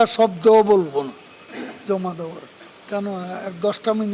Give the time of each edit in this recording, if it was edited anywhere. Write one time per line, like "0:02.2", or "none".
0:02.8